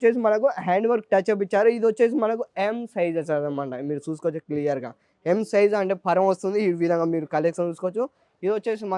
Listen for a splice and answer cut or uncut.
uncut